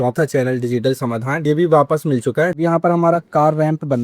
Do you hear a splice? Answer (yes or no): yes